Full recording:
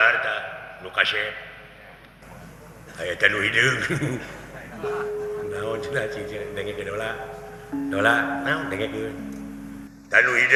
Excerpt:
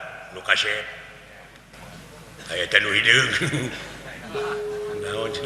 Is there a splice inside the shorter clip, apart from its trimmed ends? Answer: no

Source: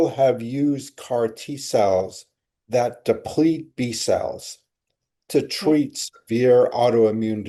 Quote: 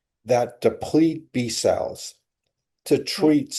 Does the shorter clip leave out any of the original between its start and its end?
no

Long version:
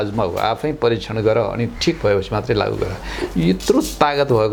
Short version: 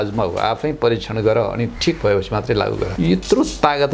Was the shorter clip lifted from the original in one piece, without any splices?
no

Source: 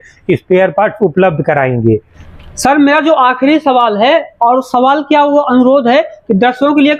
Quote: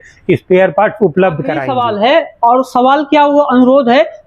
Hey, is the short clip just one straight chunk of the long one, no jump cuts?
no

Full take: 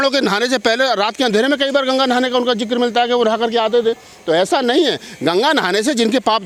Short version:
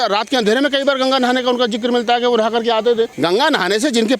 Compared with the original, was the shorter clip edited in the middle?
yes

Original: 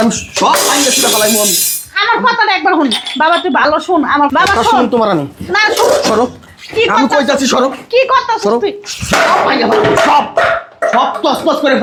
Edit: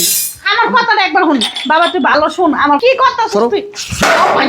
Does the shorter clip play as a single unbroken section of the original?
no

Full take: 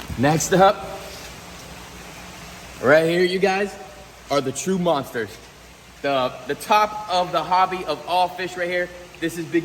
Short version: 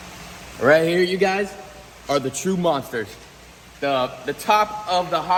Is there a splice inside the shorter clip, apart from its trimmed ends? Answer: no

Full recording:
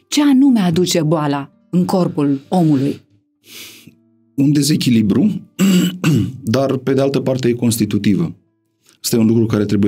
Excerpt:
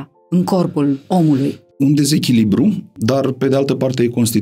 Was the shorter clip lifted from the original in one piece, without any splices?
no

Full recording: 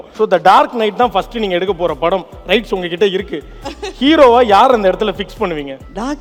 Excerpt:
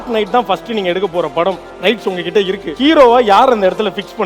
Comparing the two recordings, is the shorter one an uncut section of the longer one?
no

